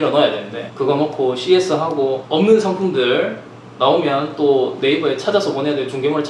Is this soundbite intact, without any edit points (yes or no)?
yes